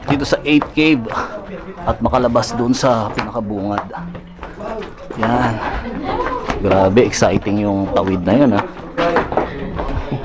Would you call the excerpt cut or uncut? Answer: uncut